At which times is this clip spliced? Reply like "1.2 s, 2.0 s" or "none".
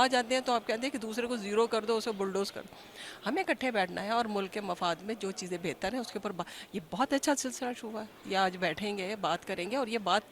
none